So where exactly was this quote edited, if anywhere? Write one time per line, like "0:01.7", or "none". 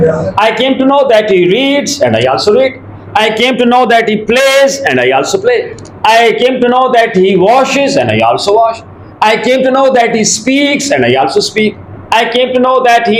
none